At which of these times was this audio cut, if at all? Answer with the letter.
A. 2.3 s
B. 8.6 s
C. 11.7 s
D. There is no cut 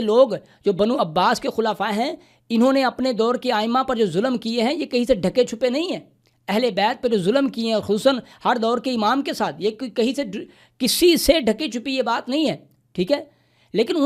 D